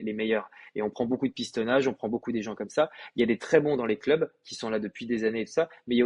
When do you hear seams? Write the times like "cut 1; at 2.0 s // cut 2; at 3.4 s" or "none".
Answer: none